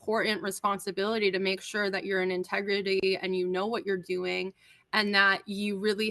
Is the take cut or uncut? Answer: uncut